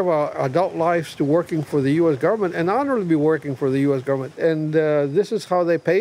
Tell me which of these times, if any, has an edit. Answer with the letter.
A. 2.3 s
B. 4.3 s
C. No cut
B